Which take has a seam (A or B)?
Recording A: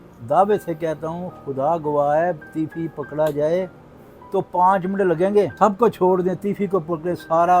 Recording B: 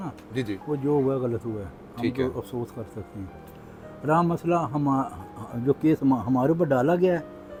A